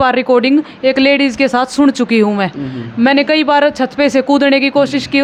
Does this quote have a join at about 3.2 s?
no; 0 cuts

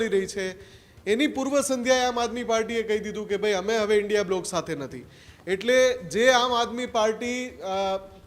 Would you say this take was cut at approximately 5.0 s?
no; 0 cuts

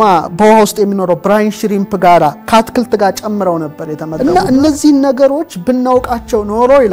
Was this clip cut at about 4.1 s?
yes; 1 cut; at 4.1 s

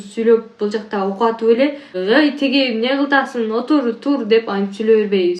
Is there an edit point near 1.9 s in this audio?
yes; 1 cut; at 1.9 s

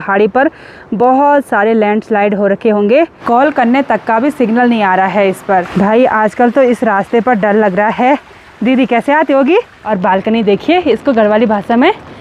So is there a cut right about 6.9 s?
no; 3 cuts; at 3.2 s, 5.7 s, 9.8 s

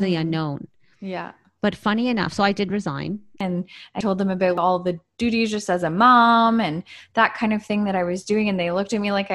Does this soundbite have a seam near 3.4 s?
yes; 1 cut; at 3.4 s

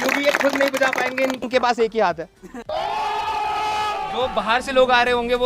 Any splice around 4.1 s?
yes; 1 cut; at 4.1 s

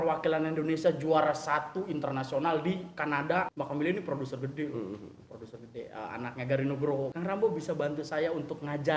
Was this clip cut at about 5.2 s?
no; 2 cuts; at 3.5 s, 7.1 s

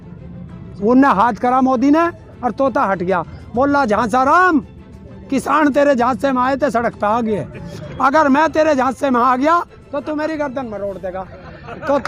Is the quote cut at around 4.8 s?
no; 0 cuts

